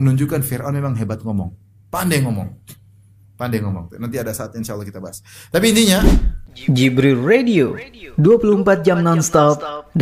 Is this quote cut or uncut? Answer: cut